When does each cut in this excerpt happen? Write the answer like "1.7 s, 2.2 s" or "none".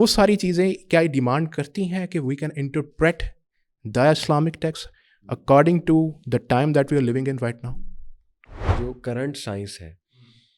8.8 s